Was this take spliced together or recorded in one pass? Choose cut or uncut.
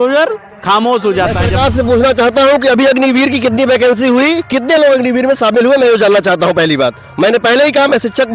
cut